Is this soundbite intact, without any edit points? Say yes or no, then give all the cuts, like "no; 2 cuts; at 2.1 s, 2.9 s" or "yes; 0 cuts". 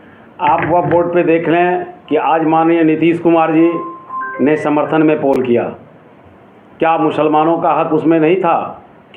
yes; 0 cuts